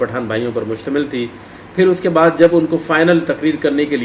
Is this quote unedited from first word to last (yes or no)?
yes